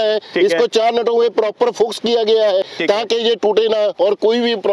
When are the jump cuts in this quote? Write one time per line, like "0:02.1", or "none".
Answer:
0:02.7